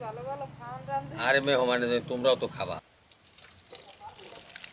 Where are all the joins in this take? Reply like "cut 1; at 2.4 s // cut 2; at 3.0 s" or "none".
cut 1; at 2.8 s